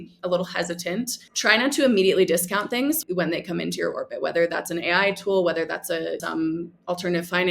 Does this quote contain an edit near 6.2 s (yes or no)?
yes